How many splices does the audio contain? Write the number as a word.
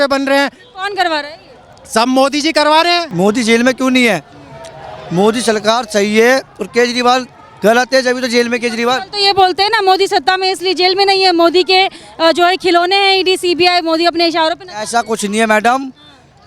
one